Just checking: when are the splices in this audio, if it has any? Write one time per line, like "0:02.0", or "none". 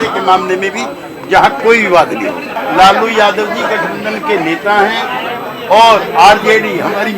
0:02.6